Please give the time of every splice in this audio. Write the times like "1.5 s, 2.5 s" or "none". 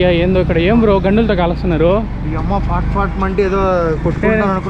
none